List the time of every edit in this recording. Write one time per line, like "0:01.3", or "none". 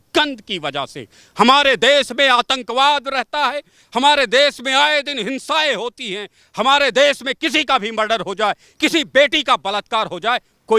none